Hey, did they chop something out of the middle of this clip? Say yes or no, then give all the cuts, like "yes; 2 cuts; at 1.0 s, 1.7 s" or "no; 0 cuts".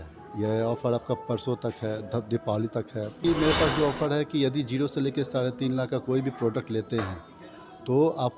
yes; 1 cut; at 3.2 s